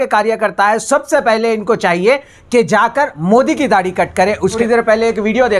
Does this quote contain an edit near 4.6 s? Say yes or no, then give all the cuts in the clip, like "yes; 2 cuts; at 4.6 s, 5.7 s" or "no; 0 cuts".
yes; 1 cut; at 4.6 s